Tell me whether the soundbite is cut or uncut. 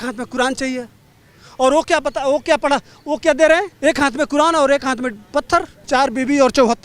cut